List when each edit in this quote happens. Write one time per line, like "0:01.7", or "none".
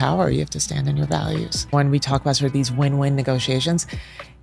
0:01.7